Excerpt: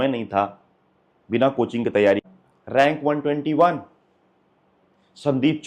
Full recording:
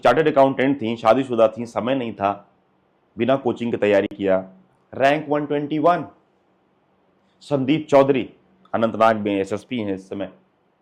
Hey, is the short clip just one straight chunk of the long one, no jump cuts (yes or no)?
no